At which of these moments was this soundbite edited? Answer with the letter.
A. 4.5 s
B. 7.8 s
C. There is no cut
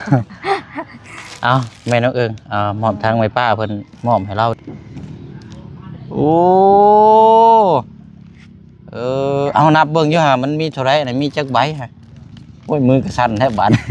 A